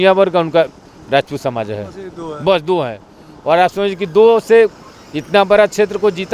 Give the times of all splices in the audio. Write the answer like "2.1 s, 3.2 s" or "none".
none